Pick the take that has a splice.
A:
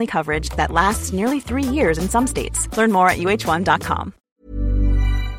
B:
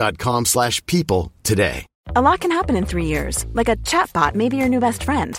B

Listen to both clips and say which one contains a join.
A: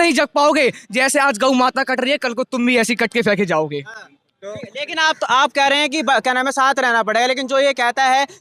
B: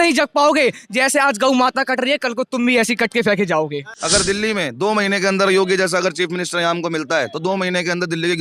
B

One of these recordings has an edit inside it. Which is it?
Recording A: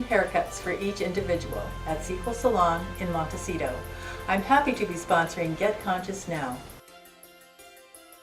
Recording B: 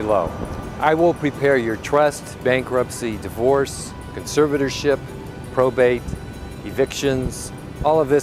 A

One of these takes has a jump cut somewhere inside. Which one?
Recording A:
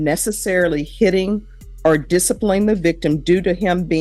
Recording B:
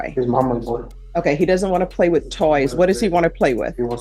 B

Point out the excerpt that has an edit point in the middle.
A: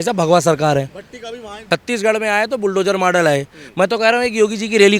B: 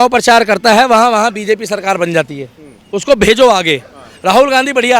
A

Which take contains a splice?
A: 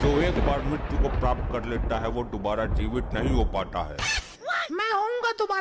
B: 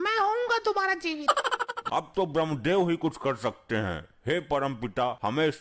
B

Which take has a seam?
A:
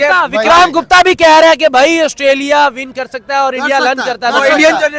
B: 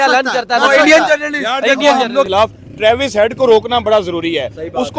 B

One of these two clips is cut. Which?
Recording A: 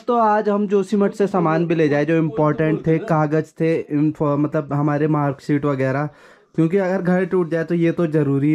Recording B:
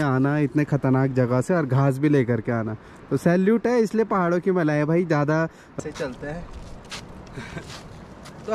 B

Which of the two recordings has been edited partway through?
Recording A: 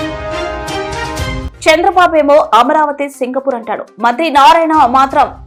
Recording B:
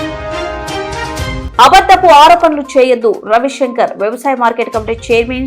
B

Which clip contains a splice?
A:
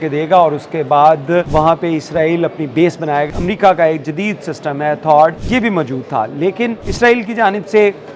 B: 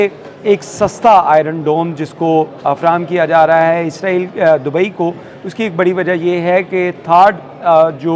A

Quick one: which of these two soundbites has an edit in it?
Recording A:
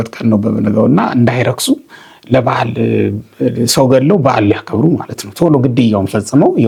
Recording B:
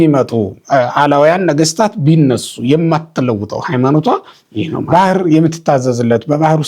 B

